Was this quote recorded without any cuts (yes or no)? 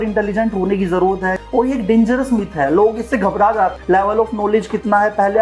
no